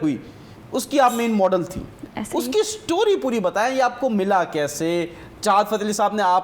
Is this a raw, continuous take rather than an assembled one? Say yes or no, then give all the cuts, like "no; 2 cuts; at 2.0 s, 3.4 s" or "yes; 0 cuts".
yes; 0 cuts